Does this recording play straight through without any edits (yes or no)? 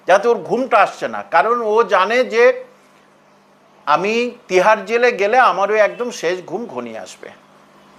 yes